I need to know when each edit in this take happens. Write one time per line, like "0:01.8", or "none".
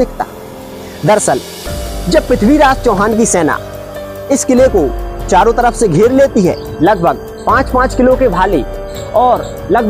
0:06.7